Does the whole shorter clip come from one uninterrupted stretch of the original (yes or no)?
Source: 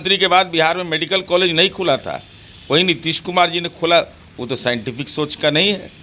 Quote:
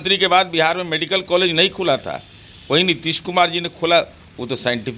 yes